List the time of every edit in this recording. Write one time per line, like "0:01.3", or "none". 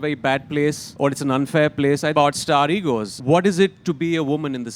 0:00.9
0:02.1
0:03.2

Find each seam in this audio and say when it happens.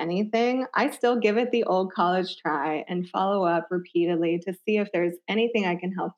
none

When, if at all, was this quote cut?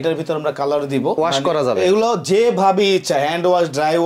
0:01.2

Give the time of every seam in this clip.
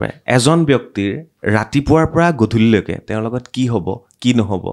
none

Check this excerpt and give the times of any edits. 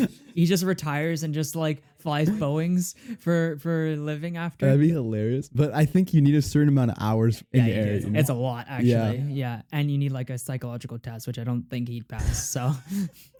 none

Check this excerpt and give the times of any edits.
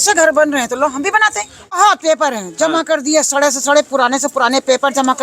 0:01.8

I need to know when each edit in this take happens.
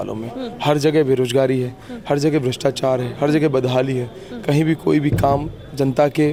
none

